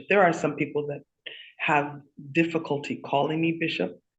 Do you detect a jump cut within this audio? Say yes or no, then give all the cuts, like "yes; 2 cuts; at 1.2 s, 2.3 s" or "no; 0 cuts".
no; 0 cuts